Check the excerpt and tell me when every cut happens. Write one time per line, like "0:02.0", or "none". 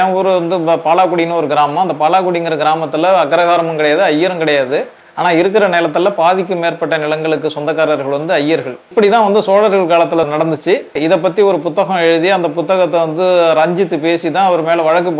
0:08.9
0:10.6